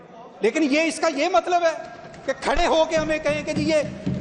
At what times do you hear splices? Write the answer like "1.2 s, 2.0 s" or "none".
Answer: none